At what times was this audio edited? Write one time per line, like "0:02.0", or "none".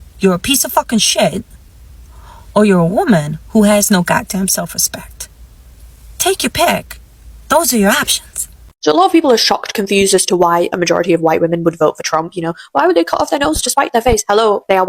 none